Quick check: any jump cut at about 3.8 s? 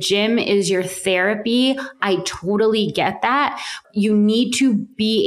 yes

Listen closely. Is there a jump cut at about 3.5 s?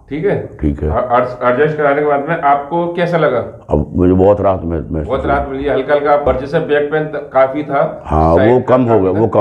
no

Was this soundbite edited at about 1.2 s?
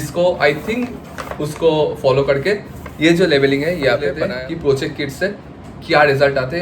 no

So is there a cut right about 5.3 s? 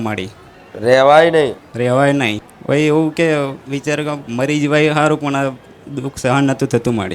no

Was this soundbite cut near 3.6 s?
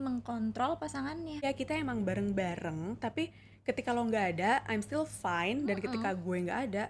no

